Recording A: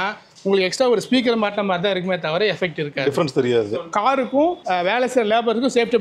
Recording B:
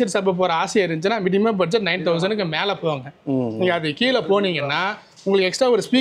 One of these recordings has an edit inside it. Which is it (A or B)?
A